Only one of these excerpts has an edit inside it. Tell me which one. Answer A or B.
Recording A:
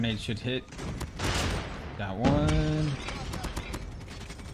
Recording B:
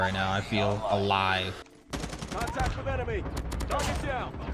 B